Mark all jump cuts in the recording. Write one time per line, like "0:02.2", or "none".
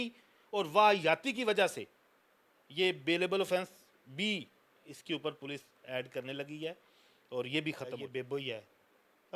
0:08.0